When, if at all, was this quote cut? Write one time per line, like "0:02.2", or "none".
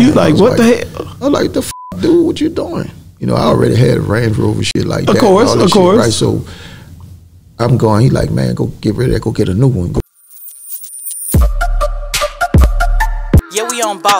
0:10.0